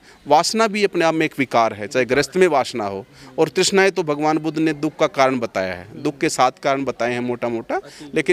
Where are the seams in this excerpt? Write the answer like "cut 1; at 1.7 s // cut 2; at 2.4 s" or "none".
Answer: none